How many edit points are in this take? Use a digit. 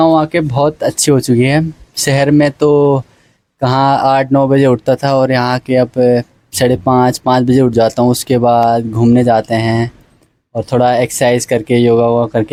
0